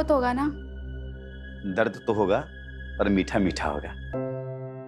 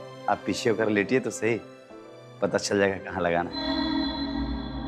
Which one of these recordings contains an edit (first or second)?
second